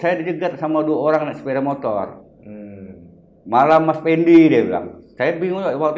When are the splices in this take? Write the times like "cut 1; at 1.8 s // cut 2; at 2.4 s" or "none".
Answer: none